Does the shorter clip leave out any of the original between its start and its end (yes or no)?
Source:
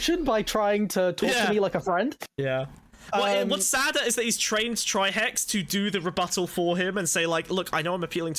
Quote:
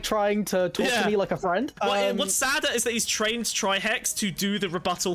yes